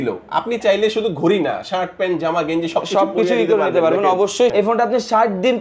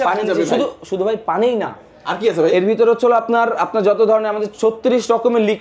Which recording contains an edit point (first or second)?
first